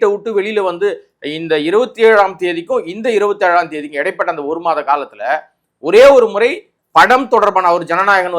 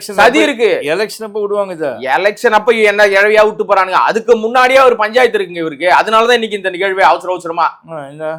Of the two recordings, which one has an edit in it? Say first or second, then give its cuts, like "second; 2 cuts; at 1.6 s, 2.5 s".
first; 1 cut; at 6.7 s